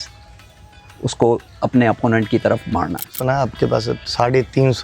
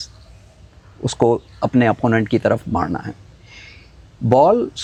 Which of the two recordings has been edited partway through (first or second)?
first